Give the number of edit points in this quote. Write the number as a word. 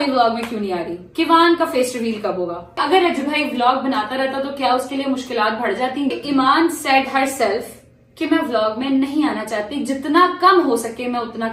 two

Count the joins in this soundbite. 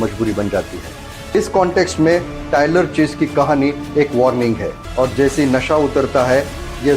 two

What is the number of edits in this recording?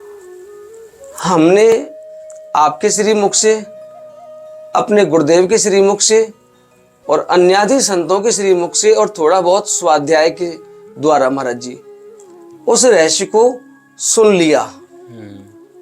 one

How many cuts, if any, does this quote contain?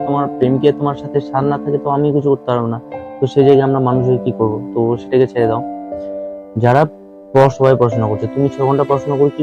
one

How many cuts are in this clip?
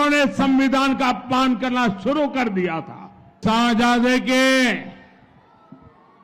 one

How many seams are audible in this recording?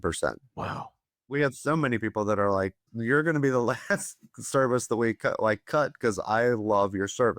two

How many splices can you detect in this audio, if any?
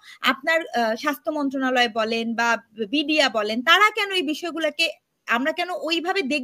zero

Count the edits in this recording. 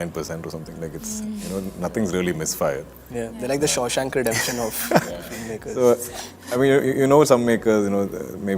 zero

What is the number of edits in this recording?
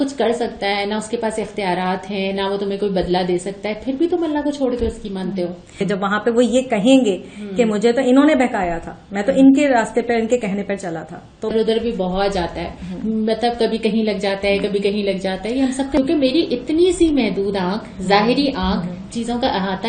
three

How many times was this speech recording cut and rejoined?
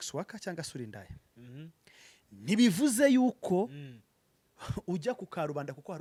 zero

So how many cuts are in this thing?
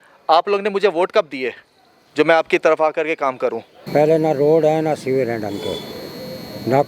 one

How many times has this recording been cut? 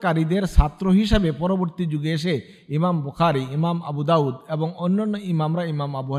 zero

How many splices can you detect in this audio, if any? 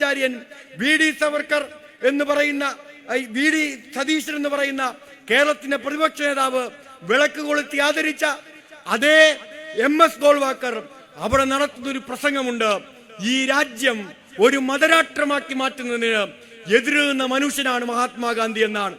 zero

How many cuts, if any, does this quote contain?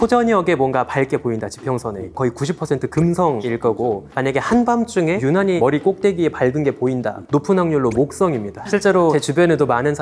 five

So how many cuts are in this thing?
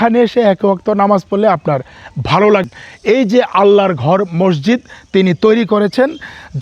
one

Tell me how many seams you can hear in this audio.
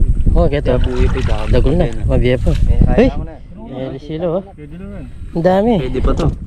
zero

